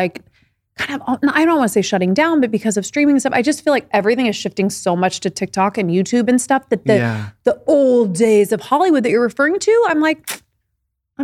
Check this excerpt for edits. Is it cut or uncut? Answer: uncut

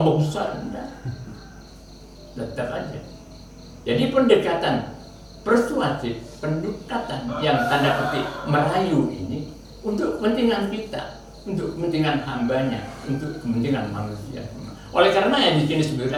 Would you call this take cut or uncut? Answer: uncut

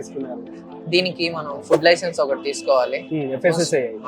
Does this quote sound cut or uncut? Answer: uncut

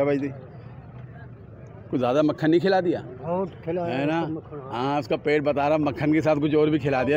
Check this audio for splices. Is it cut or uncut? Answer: uncut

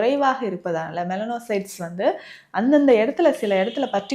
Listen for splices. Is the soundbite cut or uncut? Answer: uncut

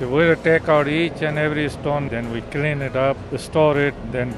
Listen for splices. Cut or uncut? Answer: cut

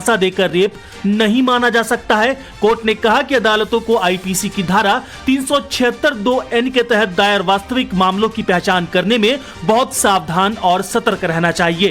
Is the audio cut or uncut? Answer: cut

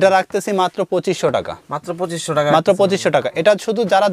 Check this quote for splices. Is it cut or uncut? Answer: uncut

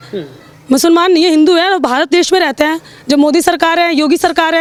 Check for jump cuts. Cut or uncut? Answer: uncut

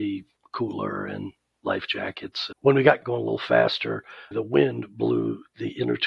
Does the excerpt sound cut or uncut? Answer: cut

